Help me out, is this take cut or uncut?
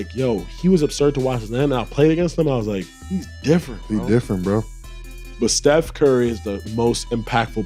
uncut